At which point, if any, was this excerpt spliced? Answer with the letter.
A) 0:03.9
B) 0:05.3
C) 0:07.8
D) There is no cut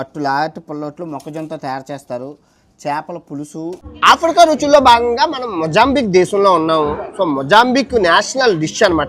A